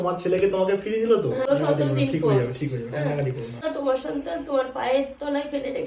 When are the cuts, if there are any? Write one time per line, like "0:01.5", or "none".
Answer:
0:01.5
0:03.6